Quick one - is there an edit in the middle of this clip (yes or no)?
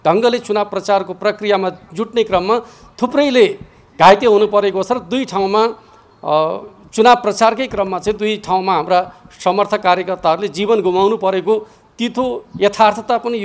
no